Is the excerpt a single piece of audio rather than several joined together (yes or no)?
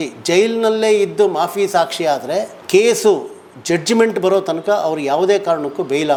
yes